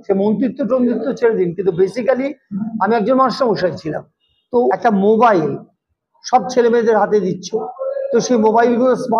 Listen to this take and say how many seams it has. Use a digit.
1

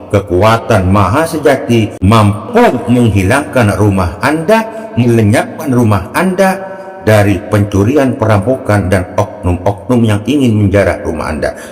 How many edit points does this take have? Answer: 1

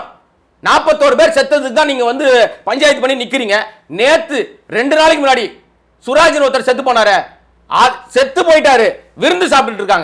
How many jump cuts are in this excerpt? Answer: 0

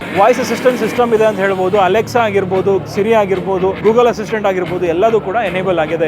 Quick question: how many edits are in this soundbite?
1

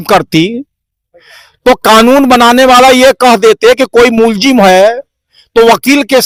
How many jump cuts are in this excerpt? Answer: 0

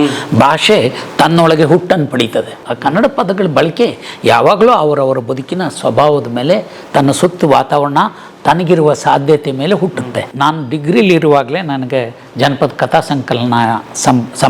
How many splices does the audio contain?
2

